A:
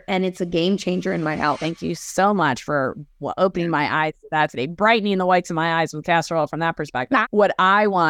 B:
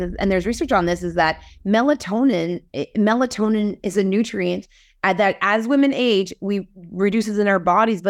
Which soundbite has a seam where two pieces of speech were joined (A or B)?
A